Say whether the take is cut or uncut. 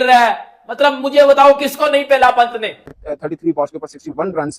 cut